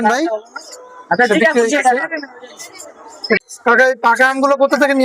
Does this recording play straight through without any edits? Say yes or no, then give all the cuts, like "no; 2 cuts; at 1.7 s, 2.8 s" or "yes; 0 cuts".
no; 1 cut; at 3.4 s